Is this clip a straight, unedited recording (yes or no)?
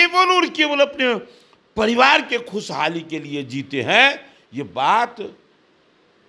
yes